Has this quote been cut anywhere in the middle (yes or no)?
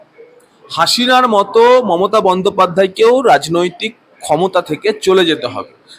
no